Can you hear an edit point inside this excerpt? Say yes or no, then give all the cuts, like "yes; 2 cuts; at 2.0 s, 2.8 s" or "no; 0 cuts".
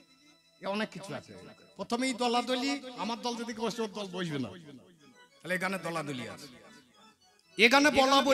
no; 0 cuts